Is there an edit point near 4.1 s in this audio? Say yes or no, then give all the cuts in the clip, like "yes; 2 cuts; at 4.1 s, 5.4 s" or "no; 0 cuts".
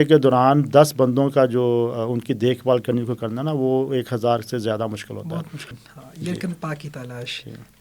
no; 1 cut; at 5.7 s